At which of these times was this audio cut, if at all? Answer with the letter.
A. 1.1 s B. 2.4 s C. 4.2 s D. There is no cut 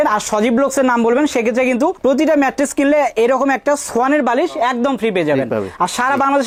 D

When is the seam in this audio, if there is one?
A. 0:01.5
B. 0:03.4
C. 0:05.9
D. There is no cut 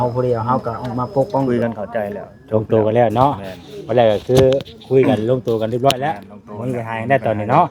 A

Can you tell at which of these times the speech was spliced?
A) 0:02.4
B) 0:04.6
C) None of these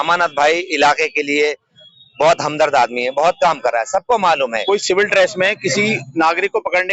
B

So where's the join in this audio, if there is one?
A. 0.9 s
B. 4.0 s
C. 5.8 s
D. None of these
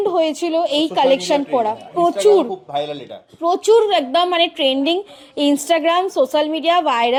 D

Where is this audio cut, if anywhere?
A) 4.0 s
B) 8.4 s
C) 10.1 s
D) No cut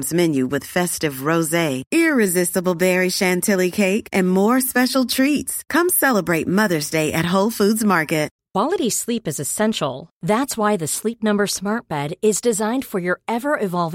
B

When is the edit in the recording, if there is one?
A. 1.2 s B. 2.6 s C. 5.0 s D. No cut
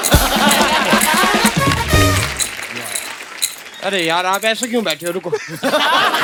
D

